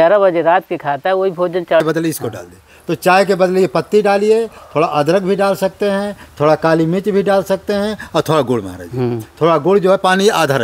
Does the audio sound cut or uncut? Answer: cut